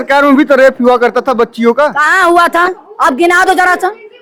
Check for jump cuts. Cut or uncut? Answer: uncut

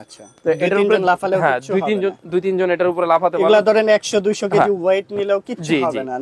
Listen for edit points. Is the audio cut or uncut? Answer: uncut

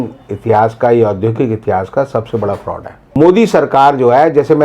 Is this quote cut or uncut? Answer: cut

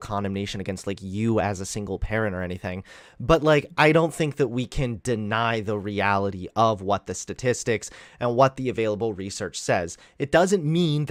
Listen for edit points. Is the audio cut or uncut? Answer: uncut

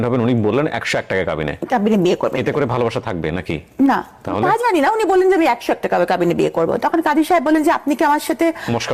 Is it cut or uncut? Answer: uncut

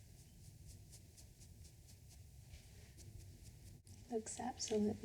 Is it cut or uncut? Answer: cut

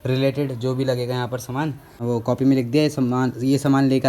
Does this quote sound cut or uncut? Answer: cut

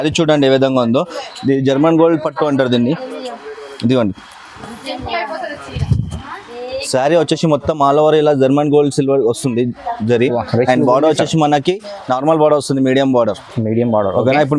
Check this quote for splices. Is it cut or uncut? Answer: uncut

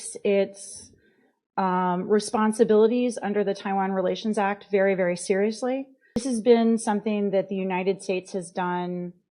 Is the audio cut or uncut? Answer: cut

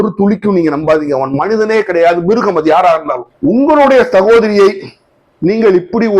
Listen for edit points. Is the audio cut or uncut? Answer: cut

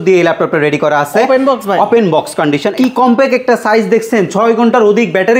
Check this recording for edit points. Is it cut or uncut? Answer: cut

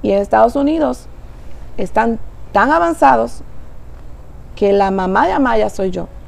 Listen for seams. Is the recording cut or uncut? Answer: uncut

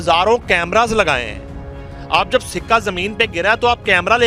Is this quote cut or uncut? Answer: uncut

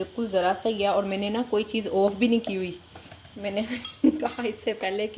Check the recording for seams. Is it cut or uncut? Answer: uncut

